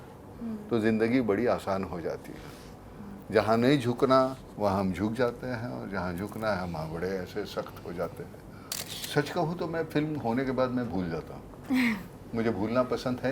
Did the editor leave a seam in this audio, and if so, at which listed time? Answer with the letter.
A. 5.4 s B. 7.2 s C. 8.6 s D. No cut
C